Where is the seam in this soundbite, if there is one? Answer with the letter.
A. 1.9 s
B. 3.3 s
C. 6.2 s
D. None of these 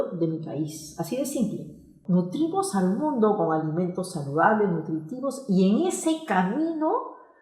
A